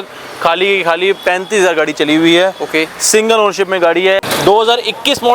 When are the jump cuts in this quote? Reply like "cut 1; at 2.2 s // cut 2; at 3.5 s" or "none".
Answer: cut 1; at 4.2 s